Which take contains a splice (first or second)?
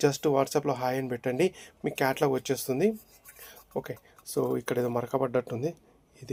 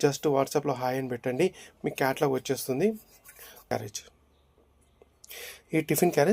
second